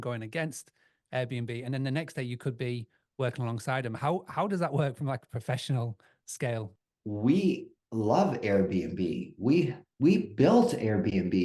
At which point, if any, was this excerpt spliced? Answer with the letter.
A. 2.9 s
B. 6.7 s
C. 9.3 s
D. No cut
B